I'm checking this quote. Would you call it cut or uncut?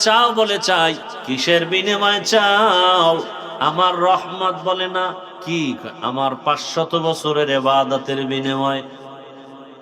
cut